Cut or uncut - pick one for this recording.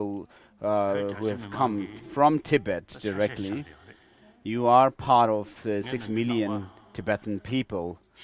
uncut